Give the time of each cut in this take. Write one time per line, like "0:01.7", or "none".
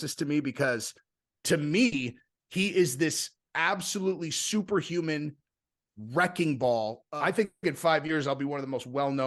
0:07.0